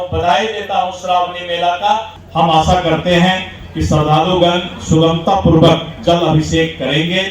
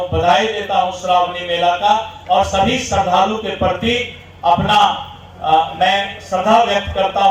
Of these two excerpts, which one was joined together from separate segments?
first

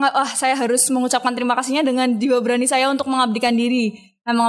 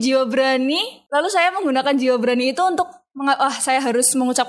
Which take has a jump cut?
second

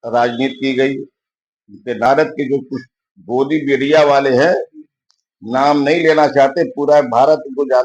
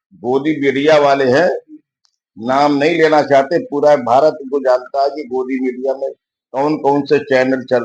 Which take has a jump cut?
first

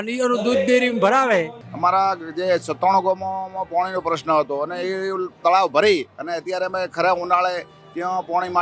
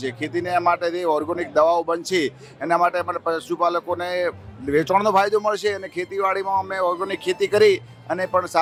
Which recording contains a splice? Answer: first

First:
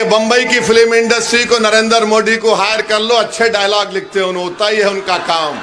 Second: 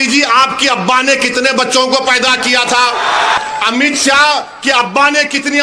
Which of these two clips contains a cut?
second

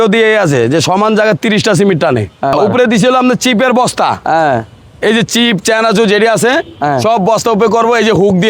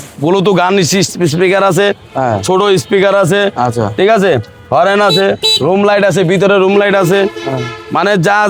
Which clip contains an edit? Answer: first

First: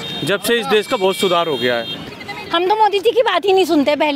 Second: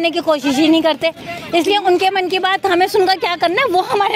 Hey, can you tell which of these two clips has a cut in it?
first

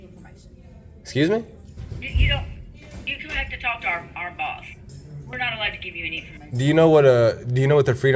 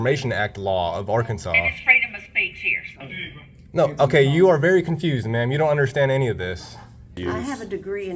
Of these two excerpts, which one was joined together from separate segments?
second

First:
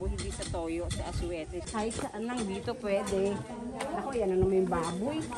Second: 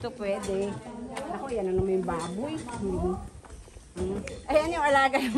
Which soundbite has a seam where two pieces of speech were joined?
first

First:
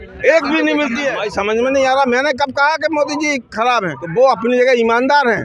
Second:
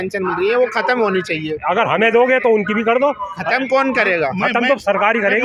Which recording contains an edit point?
first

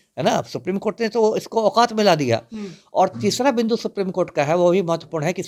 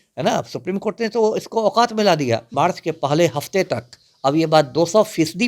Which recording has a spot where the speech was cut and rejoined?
second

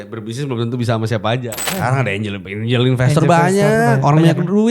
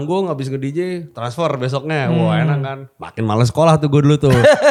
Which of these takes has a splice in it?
first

